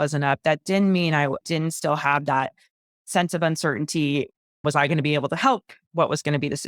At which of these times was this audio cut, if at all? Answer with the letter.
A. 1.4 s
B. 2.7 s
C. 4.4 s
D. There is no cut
A